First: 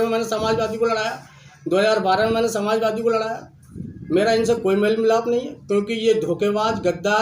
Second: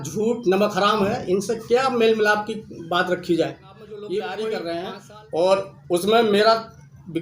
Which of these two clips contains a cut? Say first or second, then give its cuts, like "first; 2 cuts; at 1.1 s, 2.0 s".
second; 1 cut; at 4.7 s